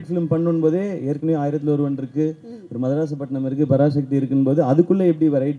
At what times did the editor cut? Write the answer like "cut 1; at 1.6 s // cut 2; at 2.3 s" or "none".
none